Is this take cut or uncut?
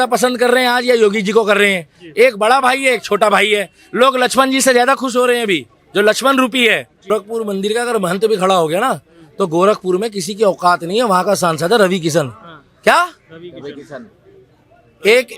cut